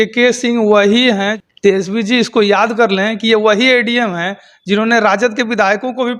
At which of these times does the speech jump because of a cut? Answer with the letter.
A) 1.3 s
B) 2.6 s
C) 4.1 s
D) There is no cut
A